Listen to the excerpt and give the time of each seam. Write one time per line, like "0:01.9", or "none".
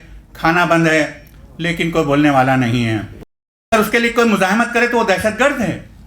0:03.7

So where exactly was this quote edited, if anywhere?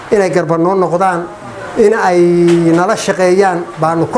none

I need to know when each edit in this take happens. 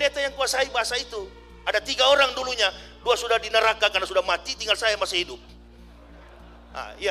none

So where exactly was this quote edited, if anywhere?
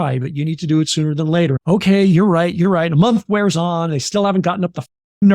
0:01.6

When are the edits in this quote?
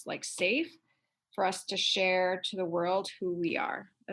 none

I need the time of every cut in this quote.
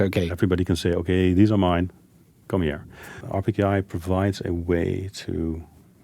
0:03.3

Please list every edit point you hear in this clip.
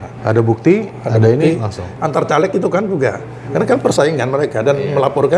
0:01.9

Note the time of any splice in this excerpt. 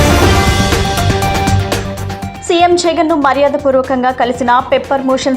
0:02.2

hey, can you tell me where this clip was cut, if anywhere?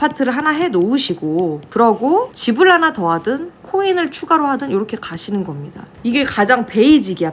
0:01.6
0:02.3
0:05.9

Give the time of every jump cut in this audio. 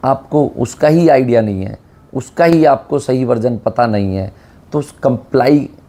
none

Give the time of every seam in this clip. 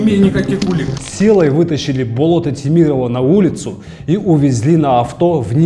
0:01.0

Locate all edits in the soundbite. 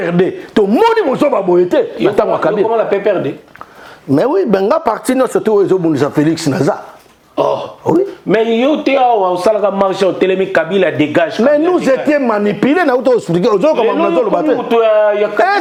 none

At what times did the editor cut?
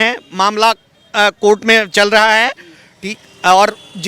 none

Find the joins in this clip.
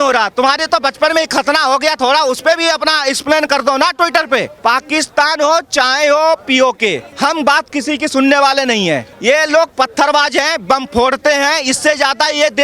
0:04.5
0:07.1
0:09.1

